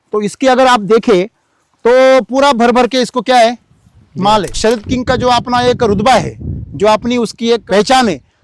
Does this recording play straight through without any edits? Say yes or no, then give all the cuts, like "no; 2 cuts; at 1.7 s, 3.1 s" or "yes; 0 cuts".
no; 1 cut; at 4.6 s